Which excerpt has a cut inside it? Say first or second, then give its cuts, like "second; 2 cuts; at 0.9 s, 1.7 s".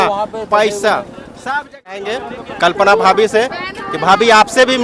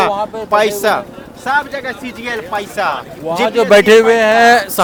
first; 1 cut; at 2.2 s